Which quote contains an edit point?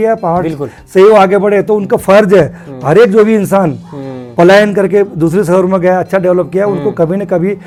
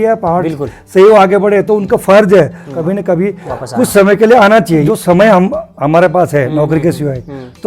second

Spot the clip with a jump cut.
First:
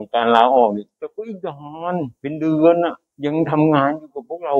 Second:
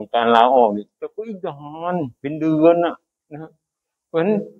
first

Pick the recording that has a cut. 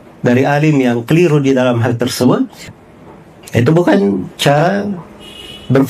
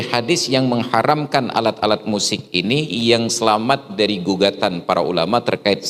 first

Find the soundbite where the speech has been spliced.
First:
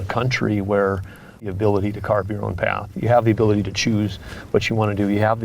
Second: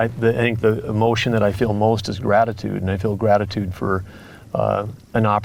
first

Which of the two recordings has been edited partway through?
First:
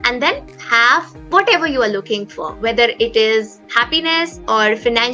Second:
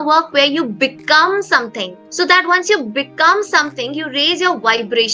first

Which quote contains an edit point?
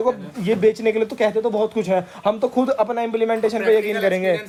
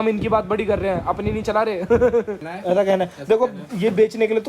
second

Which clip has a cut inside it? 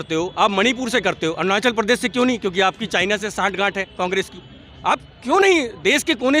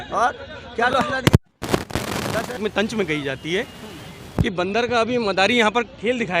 second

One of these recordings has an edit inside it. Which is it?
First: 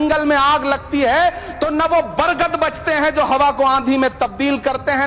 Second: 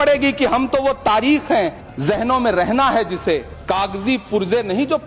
second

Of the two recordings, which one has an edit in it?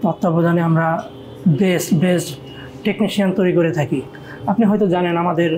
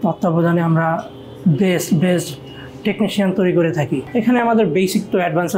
second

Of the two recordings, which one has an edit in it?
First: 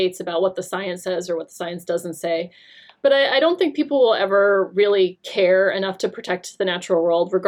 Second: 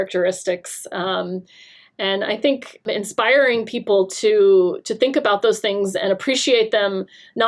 second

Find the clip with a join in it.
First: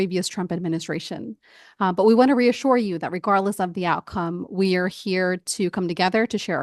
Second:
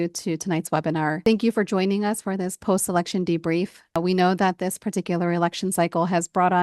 second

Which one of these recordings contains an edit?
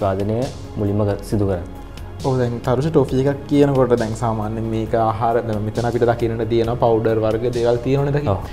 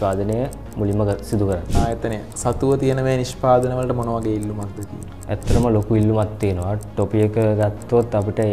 second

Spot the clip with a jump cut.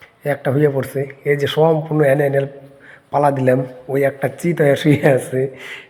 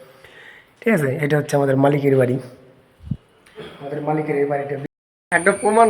second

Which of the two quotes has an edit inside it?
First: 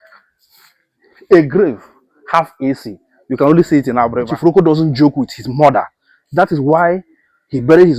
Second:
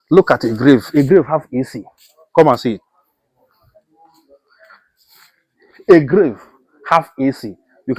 first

